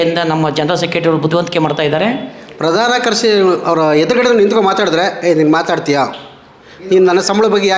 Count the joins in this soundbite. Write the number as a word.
one